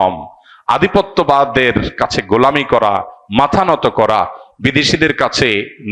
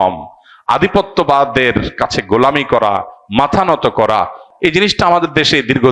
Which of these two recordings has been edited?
second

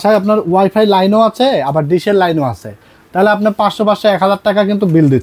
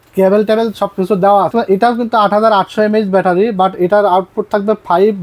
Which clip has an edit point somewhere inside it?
second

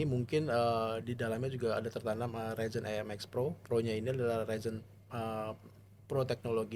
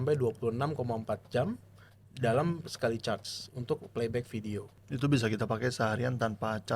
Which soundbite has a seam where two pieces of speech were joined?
second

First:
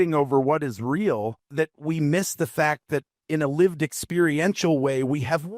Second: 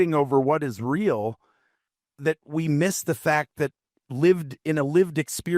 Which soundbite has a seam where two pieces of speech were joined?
first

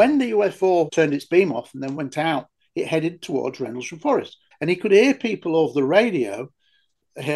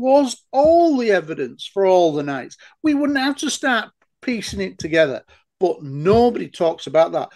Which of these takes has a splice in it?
first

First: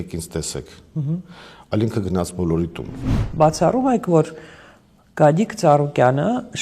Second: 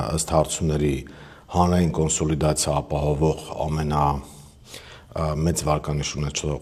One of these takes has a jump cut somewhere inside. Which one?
first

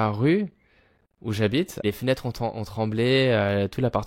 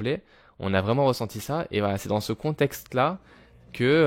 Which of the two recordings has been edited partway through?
first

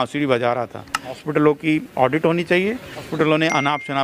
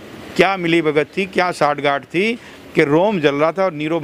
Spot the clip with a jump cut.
first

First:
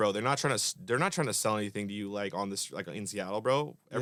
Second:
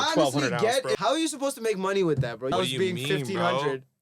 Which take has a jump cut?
second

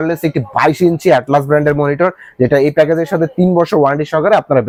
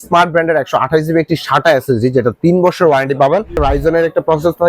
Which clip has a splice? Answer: second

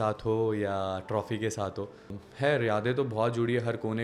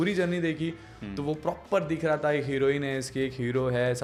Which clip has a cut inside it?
first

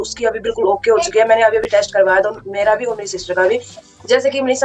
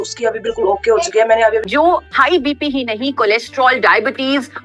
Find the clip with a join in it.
second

